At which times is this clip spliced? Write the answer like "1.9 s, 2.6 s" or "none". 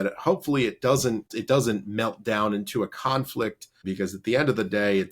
1.3 s, 3.8 s